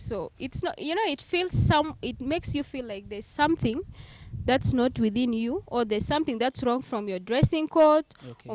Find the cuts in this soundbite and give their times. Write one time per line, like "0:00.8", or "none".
none